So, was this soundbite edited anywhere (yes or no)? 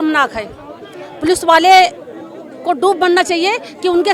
no